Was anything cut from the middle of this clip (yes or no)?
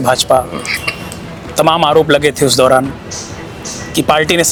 no